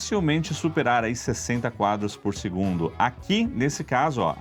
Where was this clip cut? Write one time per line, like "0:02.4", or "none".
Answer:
none